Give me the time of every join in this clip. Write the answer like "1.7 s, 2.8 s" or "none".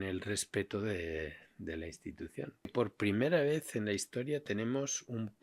2.7 s